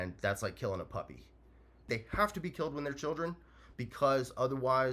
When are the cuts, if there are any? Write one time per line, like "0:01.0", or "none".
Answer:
0:01.9